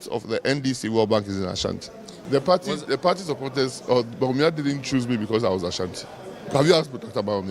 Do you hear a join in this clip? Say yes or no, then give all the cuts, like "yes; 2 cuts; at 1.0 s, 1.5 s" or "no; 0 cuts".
yes; 1 cut; at 2.2 s